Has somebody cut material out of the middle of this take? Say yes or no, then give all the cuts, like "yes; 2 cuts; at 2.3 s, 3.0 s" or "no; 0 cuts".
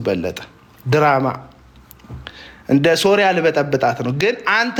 no; 0 cuts